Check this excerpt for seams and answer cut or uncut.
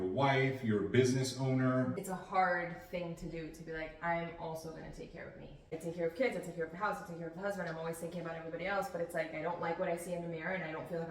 cut